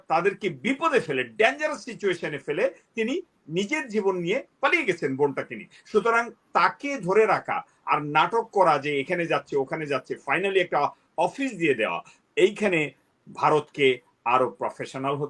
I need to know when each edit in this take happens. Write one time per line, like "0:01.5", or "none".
none